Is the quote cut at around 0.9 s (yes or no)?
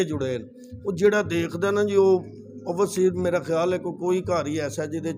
no